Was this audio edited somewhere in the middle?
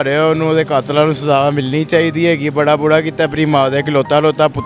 no; 0 cuts

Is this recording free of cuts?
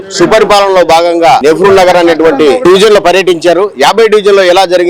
no; 2 cuts; at 1.4 s, 2.6 s

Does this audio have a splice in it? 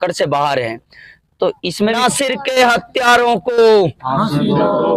yes; 1 cut; at 2.0 s

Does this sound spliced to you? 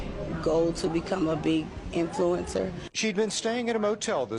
no; 0 cuts

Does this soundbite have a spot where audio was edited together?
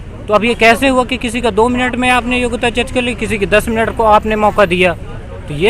no; 0 cuts

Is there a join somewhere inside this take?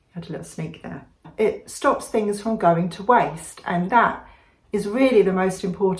yes; 1 cut; at 1.3 s

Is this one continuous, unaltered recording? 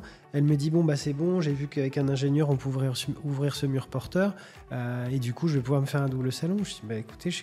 yes; 0 cuts

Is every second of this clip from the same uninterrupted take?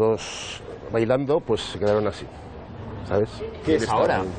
yes; 0 cuts

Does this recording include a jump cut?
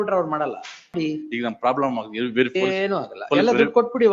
yes; 1 cut; at 0.9 s

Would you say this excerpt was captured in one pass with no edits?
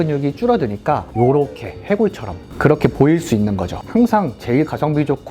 no; 2 cuts; at 1.1 s, 3.8 s

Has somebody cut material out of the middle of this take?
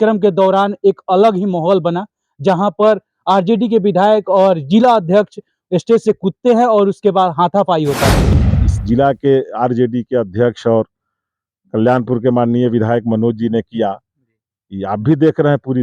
yes; 1 cut; at 8.3 s

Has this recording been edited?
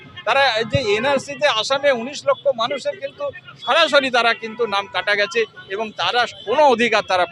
no; 0 cuts

